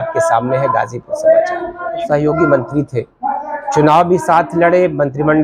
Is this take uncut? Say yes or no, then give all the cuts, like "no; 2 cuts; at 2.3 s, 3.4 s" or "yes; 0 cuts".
no; 1 cut; at 2.0 s